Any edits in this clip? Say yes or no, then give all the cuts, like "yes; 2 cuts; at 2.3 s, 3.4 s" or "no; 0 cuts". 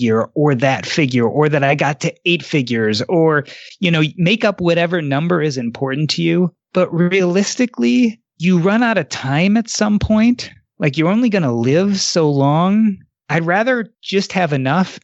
yes; 2 cuts; at 13.1 s, 14.0 s